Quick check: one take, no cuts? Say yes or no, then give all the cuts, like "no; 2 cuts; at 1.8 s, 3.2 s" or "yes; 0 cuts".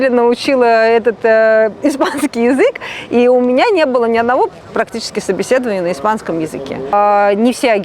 no; 1 cut; at 6.9 s